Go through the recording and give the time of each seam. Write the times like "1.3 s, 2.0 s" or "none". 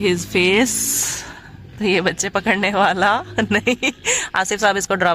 none